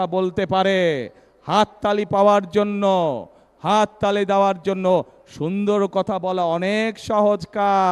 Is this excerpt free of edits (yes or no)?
yes